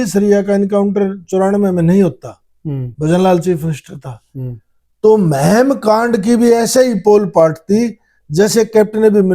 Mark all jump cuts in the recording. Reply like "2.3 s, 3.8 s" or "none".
none